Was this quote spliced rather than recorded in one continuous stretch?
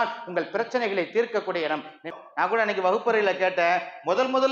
yes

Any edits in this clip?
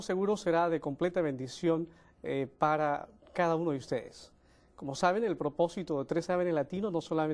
no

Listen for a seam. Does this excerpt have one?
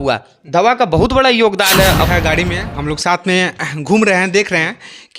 yes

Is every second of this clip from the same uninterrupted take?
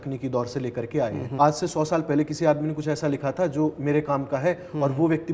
no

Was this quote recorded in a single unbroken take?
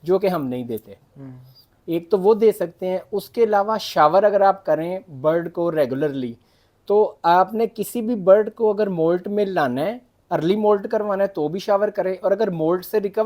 yes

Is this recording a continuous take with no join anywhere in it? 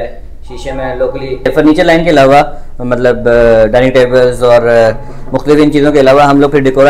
no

